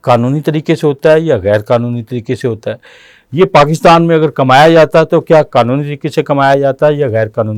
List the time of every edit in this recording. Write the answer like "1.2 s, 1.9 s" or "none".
none